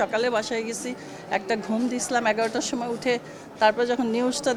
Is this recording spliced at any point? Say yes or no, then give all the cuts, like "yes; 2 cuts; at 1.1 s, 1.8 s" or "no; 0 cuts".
no; 0 cuts